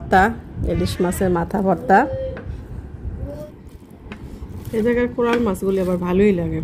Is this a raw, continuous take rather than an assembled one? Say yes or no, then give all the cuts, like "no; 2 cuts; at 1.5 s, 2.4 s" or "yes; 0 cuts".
no; 1 cut; at 3.4 s